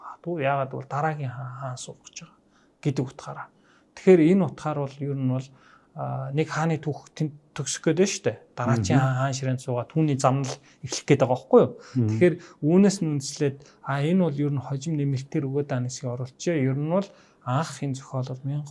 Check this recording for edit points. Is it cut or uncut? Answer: uncut